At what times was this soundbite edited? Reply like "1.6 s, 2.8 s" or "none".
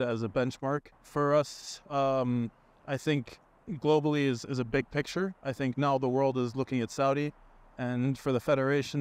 1.0 s